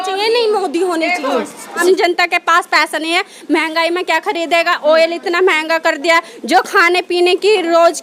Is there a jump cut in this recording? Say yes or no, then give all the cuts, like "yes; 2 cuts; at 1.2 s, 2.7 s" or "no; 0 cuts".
yes; 1 cut; at 1.7 s